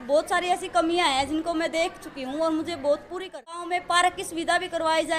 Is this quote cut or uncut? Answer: cut